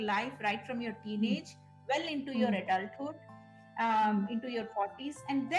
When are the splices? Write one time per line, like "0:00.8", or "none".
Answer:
none